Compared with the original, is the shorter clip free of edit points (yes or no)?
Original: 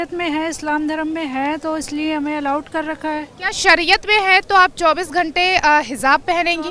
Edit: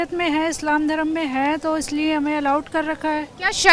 yes